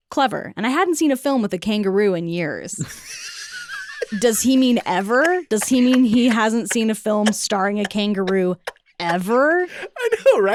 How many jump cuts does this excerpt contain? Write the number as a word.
zero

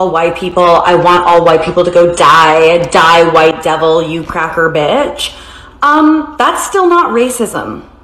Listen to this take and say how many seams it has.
one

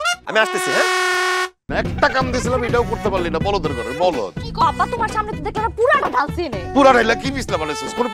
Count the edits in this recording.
one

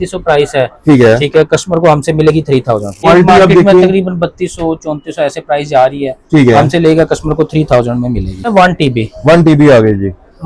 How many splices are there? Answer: two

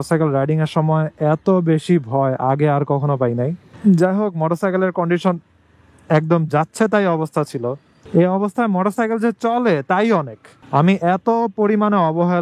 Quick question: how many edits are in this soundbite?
one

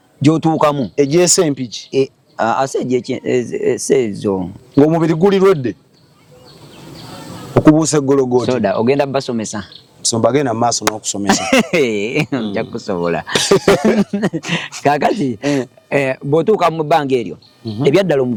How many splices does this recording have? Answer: zero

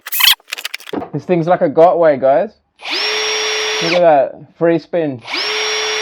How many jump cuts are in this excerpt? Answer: one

